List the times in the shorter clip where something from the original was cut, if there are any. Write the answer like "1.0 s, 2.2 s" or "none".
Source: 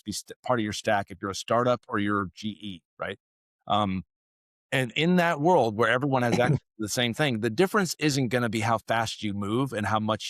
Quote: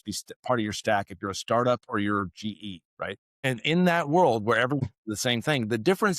3.3 s, 4.8 s